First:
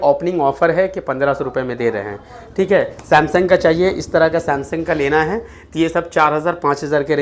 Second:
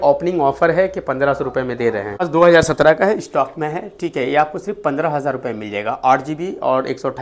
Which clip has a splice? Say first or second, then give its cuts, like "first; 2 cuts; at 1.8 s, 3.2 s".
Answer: second; 1 cut; at 2.2 s